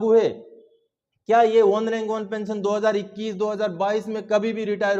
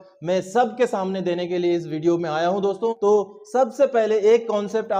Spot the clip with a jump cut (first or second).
second